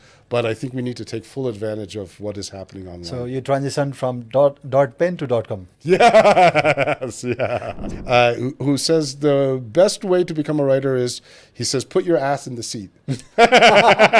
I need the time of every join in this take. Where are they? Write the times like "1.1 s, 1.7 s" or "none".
7.8 s

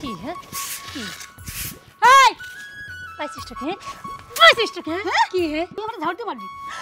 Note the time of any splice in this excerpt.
5.8 s

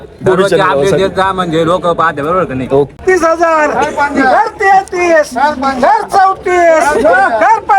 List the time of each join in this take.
3.0 s

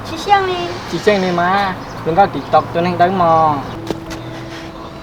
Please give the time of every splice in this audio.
3.8 s

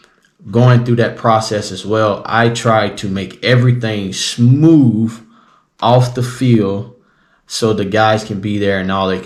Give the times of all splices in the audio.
none

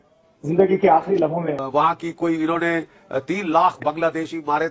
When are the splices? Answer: 1.6 s

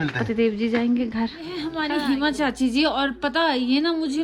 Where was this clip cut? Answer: 1.5 s

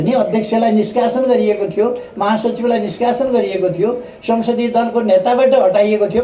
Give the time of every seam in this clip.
none

